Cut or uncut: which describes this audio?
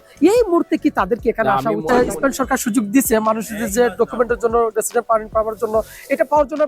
cut